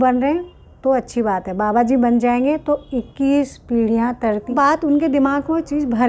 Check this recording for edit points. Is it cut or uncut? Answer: cut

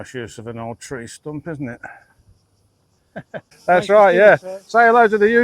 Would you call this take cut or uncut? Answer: cut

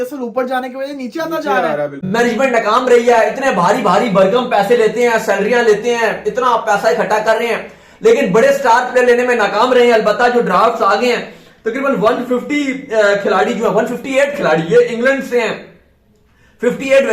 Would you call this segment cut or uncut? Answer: cut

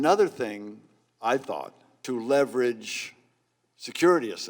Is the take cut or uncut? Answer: cut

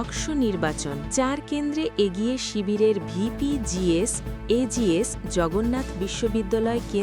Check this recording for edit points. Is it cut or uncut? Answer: cut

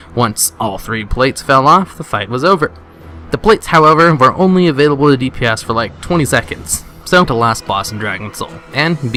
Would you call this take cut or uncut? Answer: uncut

